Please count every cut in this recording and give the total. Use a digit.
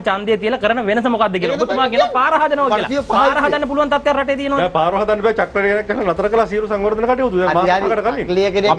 0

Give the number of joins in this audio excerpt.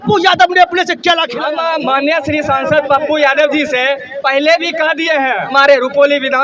2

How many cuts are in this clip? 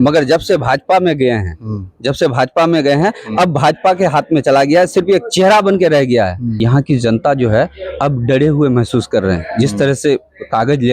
1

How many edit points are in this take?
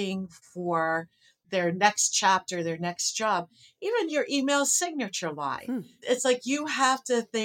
0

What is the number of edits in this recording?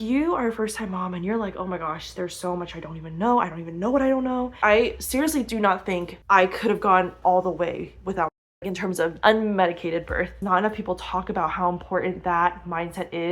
3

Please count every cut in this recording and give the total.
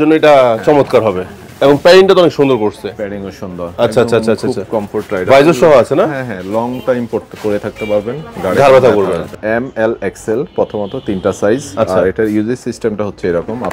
1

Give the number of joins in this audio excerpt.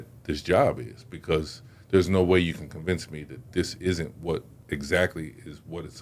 1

